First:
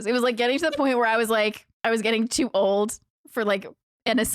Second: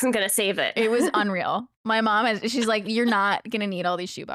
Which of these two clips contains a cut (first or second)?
first